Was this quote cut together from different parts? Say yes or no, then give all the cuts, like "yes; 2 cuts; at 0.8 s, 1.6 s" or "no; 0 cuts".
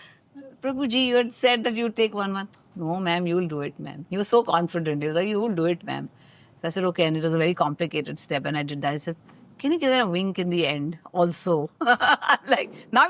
no; 0 cuts